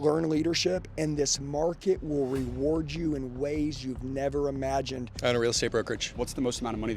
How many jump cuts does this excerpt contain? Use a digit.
2